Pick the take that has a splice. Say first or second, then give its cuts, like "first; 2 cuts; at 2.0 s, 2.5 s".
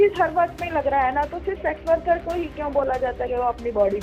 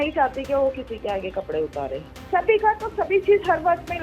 second; 1 cut; at 2.1 s